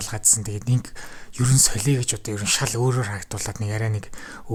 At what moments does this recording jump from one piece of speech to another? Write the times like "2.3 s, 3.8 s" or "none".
none